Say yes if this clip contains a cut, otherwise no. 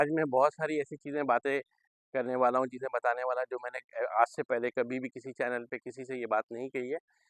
no